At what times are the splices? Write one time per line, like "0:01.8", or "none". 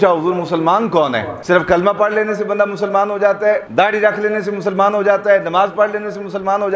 0:01.3
0:03.7